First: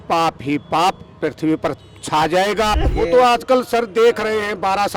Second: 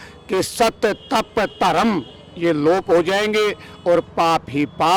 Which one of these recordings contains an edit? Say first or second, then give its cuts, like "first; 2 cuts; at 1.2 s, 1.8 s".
first; 1 cut; at 2.8 s